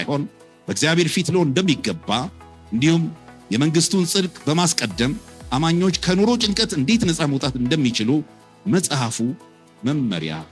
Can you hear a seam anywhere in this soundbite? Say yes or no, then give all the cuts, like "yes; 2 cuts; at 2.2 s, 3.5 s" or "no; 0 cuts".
no; 0 cuts